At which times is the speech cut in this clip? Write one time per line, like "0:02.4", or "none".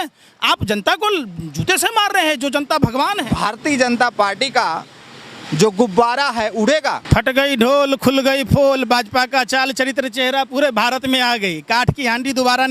0:03.3
0:07.0